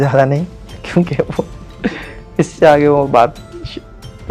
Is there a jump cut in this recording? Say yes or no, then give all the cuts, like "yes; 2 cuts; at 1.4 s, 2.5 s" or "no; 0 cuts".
no; 0 cuts